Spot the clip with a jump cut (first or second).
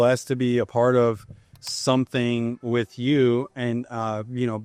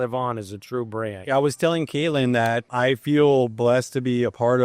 second